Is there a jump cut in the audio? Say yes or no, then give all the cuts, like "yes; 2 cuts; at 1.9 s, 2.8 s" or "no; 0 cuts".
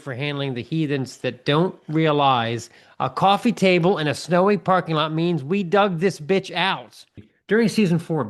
yes; 1 cut; at 7.3 s